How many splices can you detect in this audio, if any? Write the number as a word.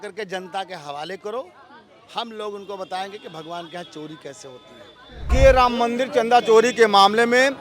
one